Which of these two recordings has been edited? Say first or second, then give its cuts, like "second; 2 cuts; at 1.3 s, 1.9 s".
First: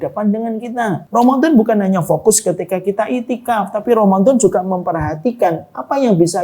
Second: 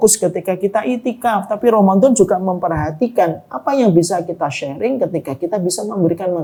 first; 1 cut; at 1.0 s